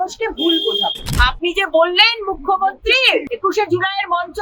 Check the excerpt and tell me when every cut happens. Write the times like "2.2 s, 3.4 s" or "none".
1.1 s, 3.3 s